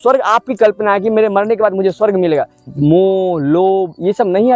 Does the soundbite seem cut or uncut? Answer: cut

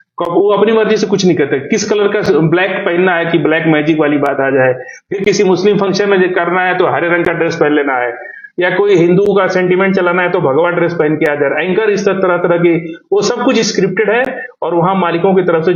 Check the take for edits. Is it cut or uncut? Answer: uncut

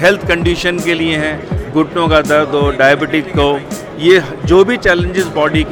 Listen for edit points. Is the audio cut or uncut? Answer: uncut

